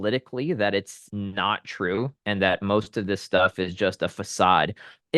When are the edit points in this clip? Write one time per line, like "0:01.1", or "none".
0:01.0

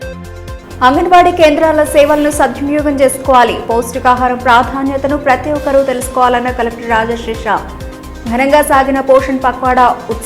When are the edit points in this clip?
none

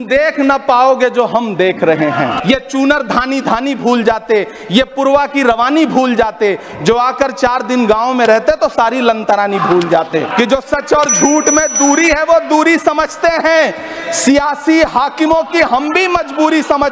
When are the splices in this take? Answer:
0:02.4
0:10.3

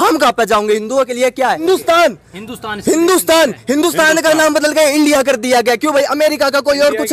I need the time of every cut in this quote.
0:01.6

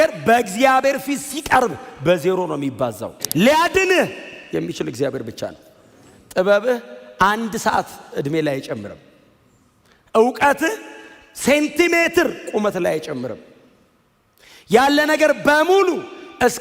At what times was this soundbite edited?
0:03.1

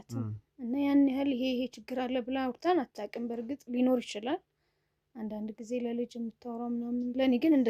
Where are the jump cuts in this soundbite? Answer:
none

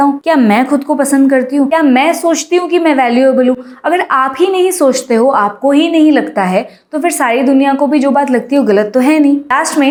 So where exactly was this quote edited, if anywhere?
none

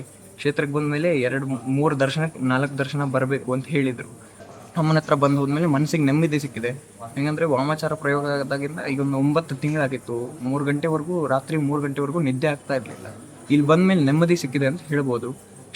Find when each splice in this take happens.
none

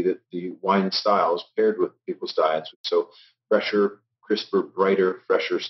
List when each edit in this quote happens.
0:02.7

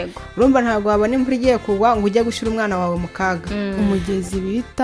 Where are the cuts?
0:03.7

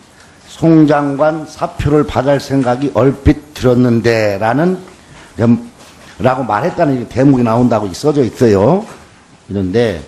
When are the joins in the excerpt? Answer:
none

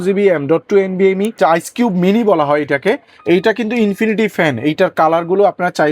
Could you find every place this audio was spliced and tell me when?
0:01.3

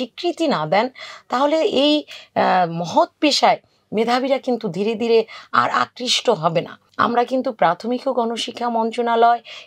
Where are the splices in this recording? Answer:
0:06.8

